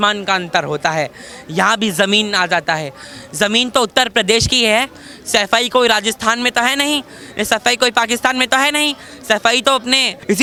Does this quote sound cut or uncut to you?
uncut